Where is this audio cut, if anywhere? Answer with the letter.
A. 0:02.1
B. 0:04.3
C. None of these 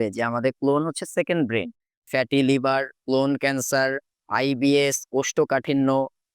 A